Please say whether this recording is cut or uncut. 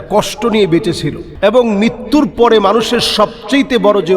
cut